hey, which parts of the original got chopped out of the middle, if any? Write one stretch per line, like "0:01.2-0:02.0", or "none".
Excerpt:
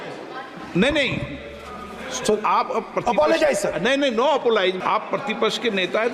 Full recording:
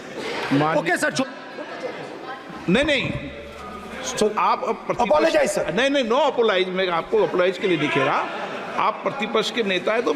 0:06.7-0:08.7